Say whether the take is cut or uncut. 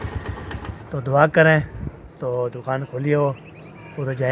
uncut